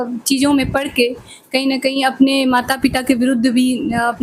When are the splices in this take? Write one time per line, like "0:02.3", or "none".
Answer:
none